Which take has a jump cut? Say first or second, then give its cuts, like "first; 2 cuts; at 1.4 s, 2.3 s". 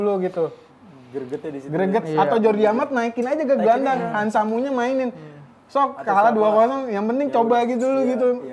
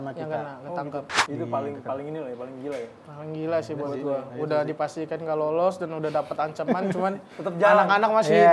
second; 1 cut; at 1.2 s